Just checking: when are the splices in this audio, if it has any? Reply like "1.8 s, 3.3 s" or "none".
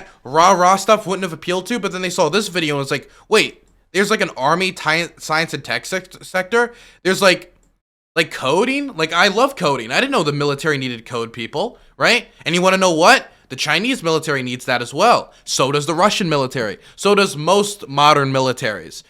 none